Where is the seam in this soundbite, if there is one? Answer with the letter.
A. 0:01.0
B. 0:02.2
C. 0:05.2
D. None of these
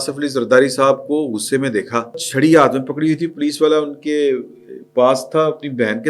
B